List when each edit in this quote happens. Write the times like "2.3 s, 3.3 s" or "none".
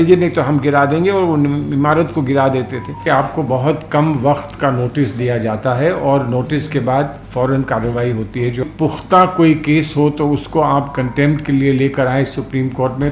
3.0 s, 8.6 s